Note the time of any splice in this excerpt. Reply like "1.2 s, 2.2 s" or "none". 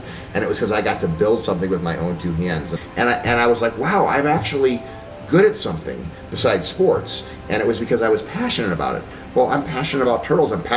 2.7 s